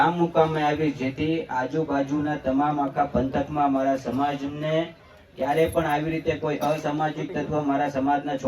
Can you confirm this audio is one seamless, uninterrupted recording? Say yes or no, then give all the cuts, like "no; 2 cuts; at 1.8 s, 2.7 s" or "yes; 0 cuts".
yes; 0 cuts